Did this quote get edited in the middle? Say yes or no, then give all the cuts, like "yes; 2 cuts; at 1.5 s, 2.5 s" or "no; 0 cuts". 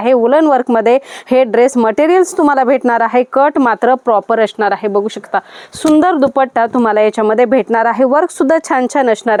no; 0 cuts